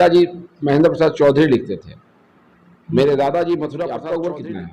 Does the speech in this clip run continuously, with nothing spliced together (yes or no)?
no